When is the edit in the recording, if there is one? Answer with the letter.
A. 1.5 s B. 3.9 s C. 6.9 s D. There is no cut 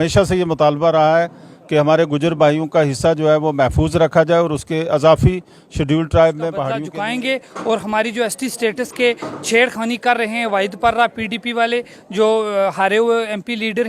C